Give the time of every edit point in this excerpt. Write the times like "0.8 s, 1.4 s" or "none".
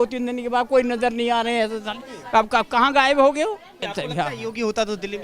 3.9 s